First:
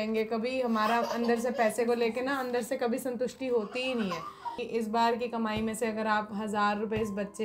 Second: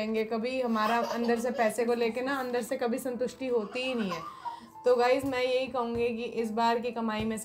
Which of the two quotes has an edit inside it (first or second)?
first